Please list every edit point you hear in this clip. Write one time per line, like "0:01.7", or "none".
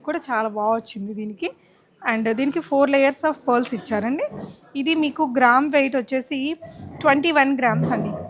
none